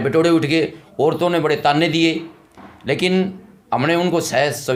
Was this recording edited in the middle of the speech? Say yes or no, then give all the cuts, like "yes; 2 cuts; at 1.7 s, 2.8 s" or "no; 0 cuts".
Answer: no; 0 cuts